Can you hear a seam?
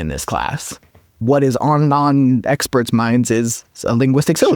yes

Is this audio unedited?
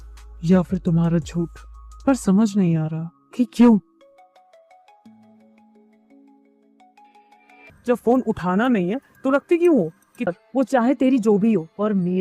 no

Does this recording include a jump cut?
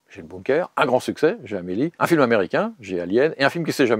yes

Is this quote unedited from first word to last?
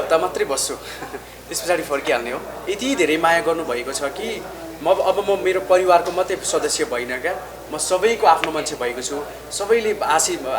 no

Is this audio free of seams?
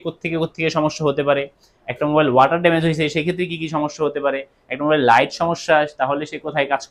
yes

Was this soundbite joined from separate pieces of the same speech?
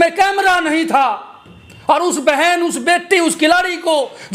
no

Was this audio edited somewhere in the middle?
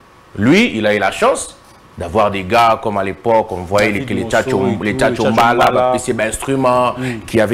no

